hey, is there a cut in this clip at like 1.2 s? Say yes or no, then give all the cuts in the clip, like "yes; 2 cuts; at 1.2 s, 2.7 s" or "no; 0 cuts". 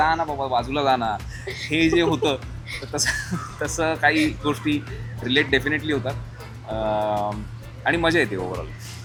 no; 0 cuts